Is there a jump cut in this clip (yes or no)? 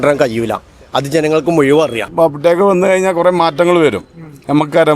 yes